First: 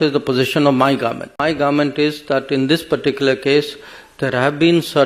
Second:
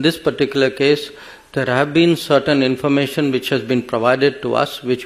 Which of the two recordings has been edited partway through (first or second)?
first